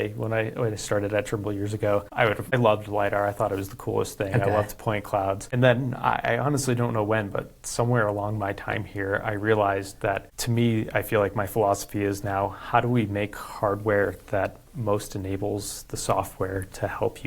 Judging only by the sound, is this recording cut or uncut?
cut